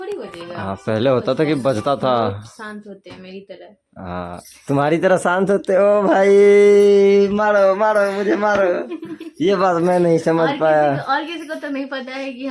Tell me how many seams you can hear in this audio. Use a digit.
0